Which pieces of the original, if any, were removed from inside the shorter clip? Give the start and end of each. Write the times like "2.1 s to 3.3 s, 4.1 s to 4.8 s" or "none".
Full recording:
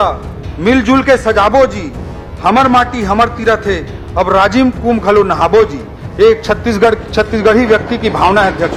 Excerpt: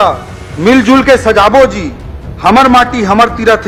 none